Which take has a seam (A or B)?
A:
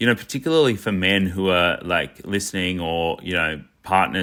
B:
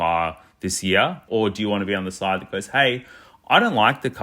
B